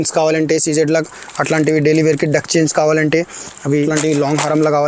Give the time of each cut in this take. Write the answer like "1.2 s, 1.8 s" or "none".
3.8 s